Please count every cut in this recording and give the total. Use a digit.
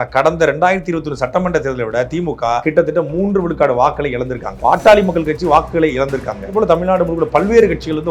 3